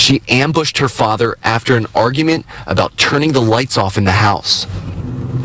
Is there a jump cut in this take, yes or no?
yes